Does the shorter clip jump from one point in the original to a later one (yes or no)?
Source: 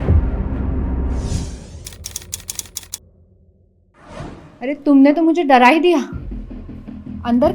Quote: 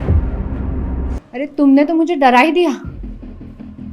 yes